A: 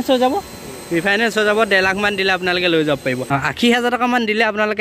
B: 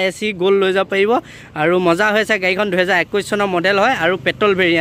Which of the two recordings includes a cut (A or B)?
A